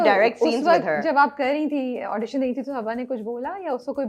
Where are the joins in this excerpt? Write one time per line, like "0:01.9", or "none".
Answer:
none